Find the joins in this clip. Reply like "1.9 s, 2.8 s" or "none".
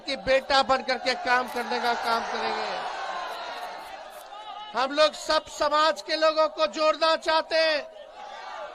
none

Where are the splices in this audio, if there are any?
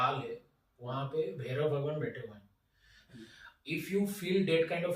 3.0 s

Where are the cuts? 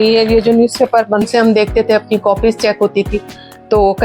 1.2 s

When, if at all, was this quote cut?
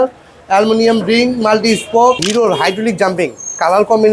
2.3 s

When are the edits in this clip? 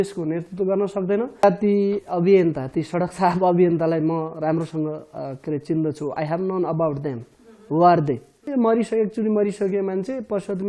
1.4 s, 8.4 s

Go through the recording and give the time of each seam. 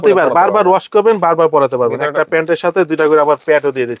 none

